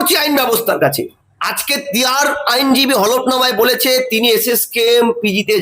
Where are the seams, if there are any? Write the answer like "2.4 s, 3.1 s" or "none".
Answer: 1.0 s